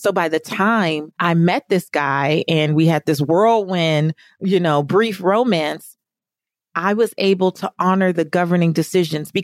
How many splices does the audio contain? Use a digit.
1